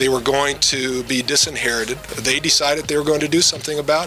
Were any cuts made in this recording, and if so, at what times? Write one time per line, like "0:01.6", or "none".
0:02.1